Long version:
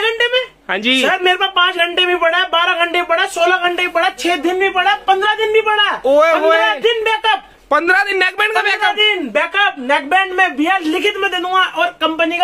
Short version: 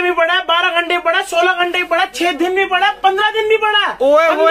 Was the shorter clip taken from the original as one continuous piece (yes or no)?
yes